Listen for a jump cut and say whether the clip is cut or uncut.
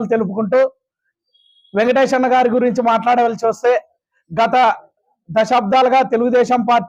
uncut